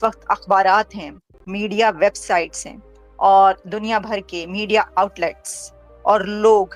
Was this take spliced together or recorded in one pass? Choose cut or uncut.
uncut